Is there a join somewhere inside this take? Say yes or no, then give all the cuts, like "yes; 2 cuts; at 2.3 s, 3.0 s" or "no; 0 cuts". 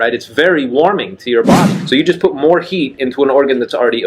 yes; 1 cut; at 1.7 s